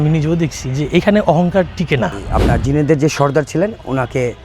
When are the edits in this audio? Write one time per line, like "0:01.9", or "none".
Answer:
0:02.2